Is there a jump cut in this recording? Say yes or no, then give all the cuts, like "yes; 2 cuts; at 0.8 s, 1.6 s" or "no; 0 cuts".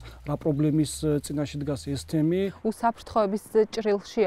yes; 1 cut; at 2.6 s